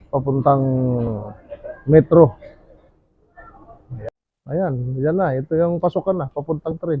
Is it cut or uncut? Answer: cut